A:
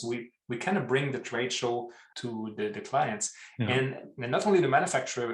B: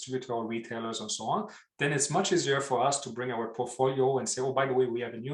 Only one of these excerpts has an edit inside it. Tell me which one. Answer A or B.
A